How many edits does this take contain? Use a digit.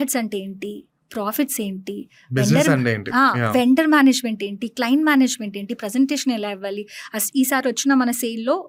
0